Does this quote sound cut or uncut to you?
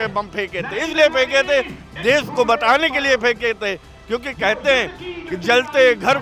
uncut